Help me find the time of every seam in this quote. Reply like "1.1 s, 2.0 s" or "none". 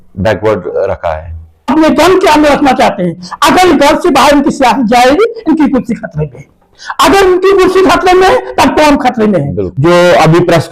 1.7 s, 9.6 s